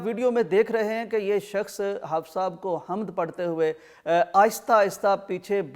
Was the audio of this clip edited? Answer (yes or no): no